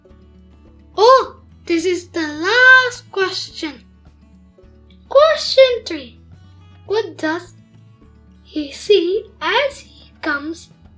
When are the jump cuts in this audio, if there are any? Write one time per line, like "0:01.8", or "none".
0:00.9